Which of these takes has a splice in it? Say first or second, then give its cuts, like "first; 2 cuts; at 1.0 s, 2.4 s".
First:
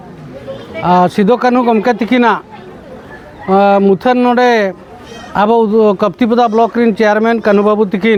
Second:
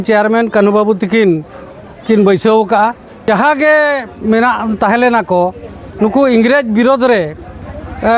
second; 1 cut; at 3.2 s